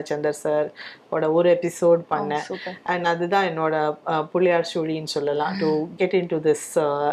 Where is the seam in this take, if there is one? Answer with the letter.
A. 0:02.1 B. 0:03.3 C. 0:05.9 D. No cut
D